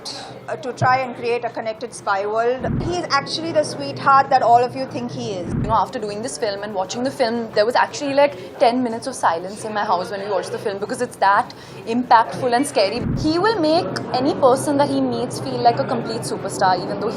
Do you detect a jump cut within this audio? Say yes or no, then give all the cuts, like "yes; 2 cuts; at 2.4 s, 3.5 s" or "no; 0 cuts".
yes; 3 cuts; at 2.8 s, 5.6 s, 13.0 s